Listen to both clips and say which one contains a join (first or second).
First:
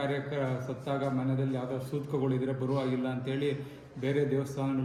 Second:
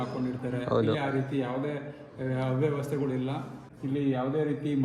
second